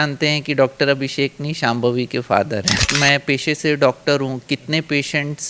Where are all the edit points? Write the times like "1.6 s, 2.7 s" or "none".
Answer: 2.9 s